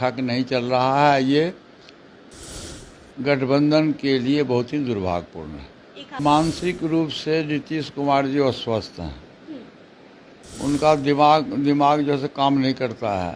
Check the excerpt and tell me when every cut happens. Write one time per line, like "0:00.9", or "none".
0:06.2